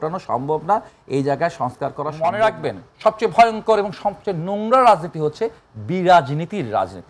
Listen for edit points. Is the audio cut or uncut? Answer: cut